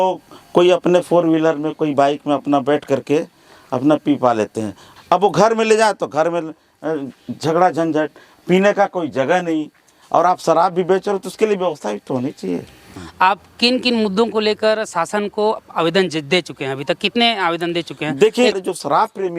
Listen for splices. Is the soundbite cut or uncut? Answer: cut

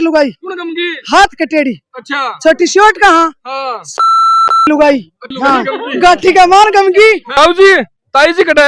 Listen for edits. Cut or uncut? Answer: cut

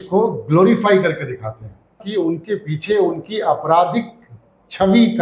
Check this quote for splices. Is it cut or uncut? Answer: cut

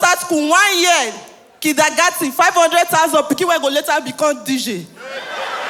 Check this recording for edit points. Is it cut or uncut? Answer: uncut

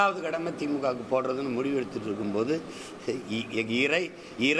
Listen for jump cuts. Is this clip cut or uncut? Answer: uncut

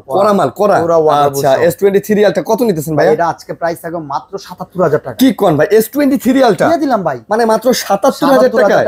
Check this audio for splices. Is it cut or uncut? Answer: uncut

